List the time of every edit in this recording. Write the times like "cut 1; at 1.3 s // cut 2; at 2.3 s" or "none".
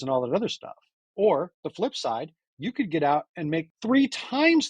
cut 1; at 3.7 s